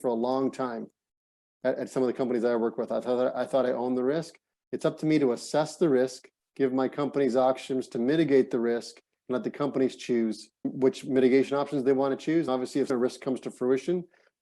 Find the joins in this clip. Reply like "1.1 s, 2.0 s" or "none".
12.8 s